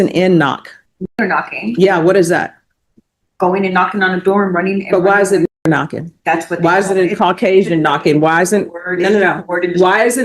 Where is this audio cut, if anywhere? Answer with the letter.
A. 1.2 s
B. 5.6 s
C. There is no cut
A